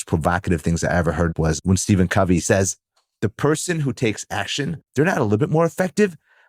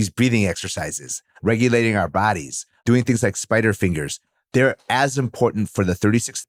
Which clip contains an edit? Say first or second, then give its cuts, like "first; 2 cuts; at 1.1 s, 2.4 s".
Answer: first; 3 cuts; at 1.3 s, 2.4 s, 4.8 s